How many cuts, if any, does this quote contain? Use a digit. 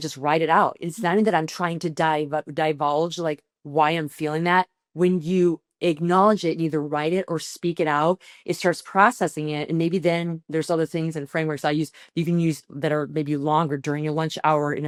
0